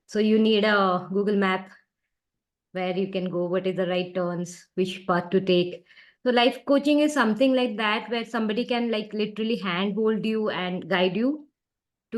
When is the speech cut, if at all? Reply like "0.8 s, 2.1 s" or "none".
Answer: none